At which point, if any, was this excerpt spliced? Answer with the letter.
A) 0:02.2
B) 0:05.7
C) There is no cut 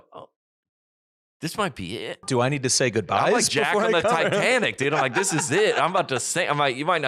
A